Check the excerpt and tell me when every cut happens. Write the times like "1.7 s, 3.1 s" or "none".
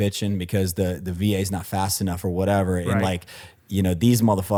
none